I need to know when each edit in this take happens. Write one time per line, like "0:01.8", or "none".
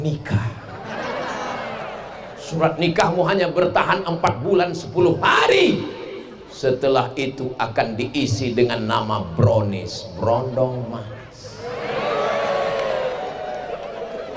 none